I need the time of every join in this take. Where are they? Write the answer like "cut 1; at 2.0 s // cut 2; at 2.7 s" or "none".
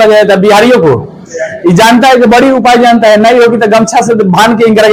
none